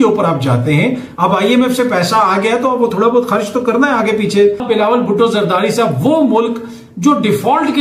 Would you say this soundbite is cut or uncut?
uncut